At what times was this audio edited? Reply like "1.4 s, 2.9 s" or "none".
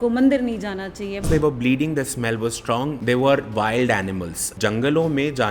1.3 s, 3.0 s, 4.5 s